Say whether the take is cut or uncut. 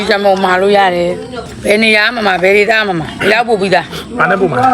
cut